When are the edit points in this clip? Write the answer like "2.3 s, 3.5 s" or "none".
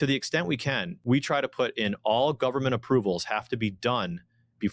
0.9 s